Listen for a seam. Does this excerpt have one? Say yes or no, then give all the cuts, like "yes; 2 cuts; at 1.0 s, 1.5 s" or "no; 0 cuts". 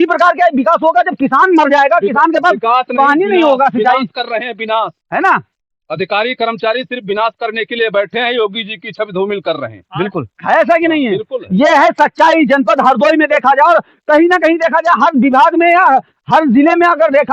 no; 0 cuts